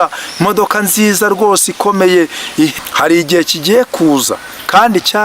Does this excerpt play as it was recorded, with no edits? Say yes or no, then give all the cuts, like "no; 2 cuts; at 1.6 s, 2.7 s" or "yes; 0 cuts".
no; 1 cut; at 2.7 s